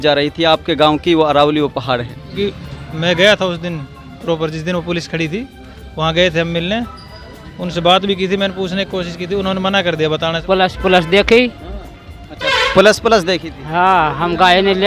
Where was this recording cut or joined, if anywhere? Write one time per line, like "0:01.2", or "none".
0:02.3
0:10.4